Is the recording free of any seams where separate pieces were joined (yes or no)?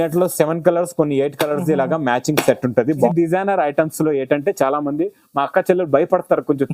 no